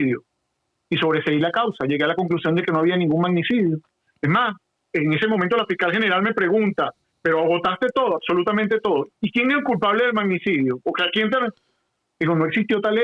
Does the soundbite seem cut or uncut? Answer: uncut